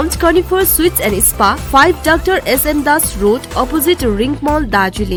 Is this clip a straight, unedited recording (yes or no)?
yes